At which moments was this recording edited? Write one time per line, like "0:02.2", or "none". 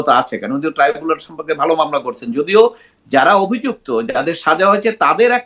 none